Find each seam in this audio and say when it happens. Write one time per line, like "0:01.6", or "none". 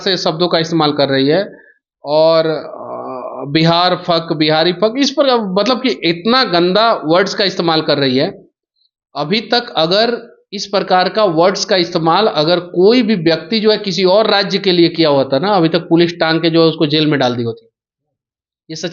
none